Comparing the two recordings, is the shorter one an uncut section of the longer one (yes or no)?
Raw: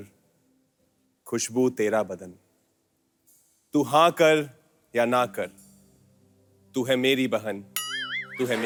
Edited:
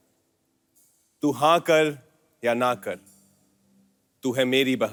yes